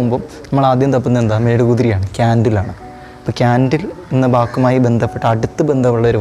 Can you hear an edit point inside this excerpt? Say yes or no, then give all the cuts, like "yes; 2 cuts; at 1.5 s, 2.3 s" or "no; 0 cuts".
no; 0 cuts